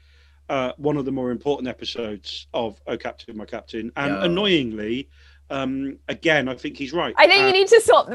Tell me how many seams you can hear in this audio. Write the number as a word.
one